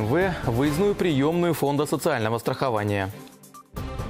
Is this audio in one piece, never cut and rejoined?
no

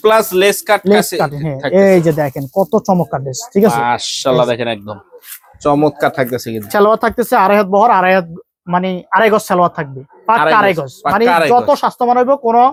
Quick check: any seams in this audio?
no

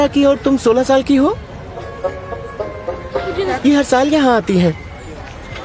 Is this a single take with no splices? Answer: yes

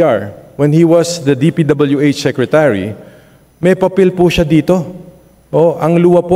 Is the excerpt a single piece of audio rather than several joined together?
yes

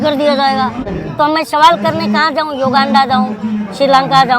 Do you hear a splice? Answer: yes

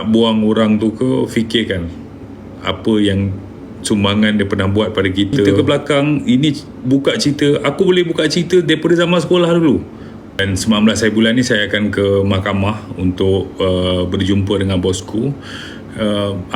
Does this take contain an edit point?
yes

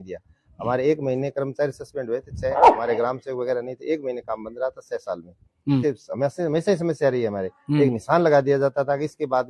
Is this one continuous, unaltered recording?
no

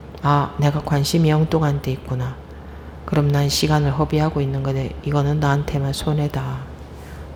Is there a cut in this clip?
no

